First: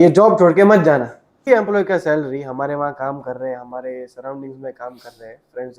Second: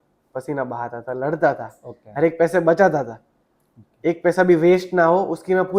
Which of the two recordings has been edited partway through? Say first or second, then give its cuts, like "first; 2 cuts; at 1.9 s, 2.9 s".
first; 1 cut; at 1.4 s